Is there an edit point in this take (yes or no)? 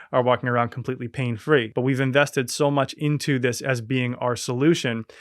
yes